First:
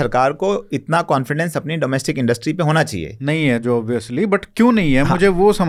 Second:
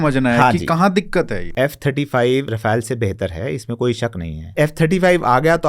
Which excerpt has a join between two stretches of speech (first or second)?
second